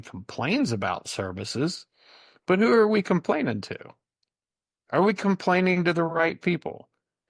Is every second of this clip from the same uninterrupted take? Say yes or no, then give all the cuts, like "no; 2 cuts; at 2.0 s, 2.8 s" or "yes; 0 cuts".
yes; 0 cuts